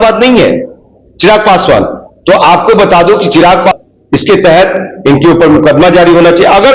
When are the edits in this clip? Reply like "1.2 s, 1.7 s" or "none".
3.7 s